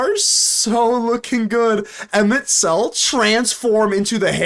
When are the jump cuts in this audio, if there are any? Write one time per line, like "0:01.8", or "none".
0:03.0

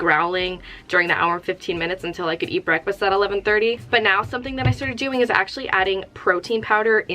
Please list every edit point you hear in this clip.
0:03.8

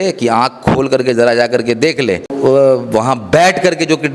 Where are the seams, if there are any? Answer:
0:02.3

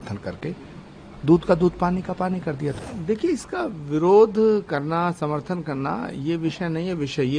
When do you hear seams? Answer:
0:02.7

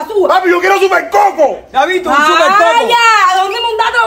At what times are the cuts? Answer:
none

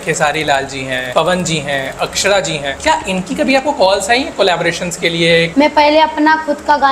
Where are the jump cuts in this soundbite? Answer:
0:01.0
0:02.7
0:05.5

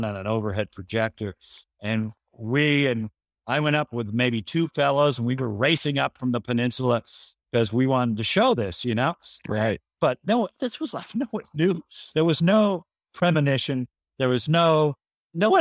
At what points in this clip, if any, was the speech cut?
none

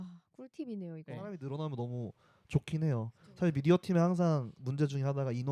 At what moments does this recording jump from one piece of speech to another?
0:01.0

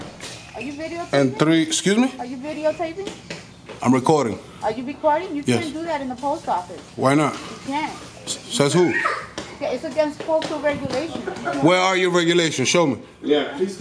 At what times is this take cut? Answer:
0:11.4

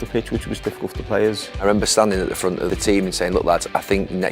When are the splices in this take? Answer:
0:01.6
0:02.7

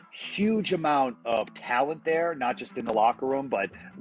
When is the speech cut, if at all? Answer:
0:01.2

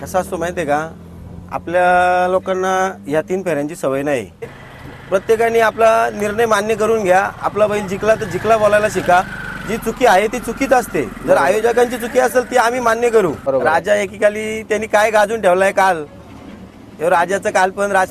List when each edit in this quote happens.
0:04.6
0:13.4

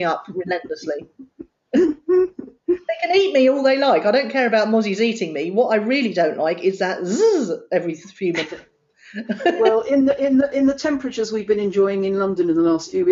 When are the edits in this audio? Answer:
none

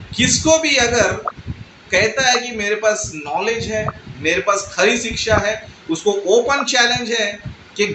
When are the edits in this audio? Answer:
none

